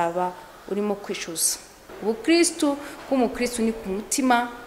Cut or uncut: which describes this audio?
cut